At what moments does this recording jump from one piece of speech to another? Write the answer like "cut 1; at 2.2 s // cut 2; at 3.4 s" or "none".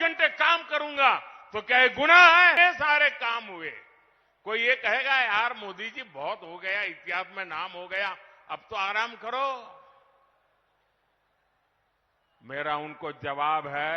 cut 1; at 2.6 s